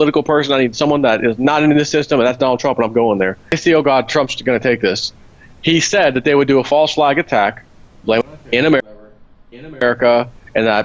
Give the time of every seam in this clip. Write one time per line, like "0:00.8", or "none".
0:03.6

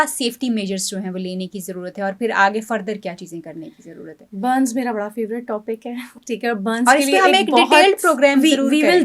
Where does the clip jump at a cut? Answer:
none

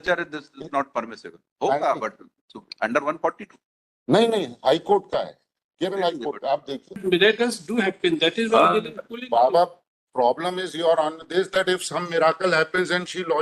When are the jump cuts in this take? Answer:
0:07.0

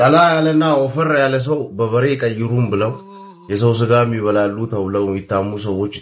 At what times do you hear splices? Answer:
none

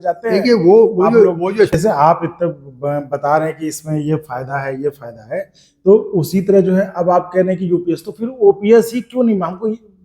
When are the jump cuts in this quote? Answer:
0:01.7

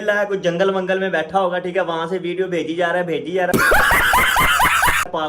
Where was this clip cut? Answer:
none

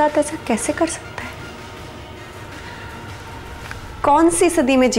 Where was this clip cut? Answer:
none

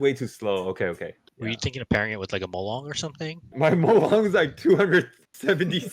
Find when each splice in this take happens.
0:01.2
0:03.5

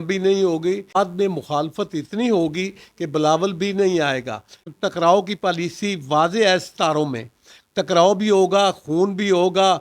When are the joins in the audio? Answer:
0:00.9
0:04.6

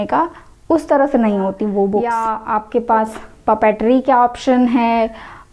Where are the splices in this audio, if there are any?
0:02.1

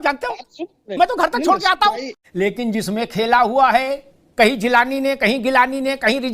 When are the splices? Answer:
0:02.1

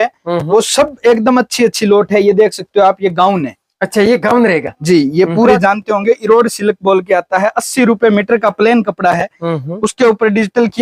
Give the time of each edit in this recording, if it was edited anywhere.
0:05.5

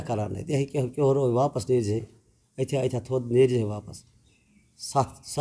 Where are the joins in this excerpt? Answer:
none

